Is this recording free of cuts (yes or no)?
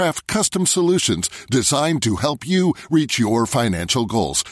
yes